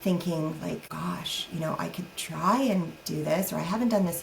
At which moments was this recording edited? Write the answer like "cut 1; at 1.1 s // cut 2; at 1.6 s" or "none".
cut 1; at 0.9 s